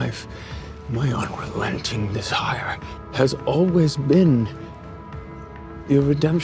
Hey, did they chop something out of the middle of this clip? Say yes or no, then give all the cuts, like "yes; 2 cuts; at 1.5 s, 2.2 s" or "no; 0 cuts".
no; 0 cuts